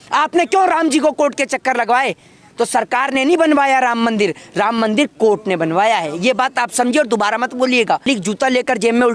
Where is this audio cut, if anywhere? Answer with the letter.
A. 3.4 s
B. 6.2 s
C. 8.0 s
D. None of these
C